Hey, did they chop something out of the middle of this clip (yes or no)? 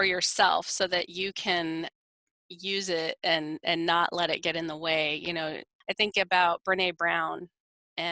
yes